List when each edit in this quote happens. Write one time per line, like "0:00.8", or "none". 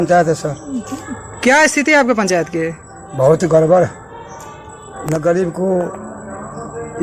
none